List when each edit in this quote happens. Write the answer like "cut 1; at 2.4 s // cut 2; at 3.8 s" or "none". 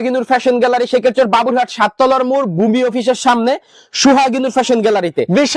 none